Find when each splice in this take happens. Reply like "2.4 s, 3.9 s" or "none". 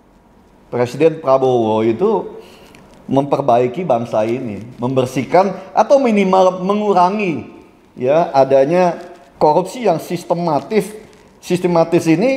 none